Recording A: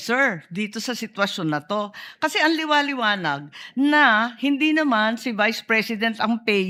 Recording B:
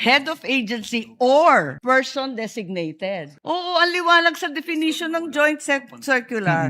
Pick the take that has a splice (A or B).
B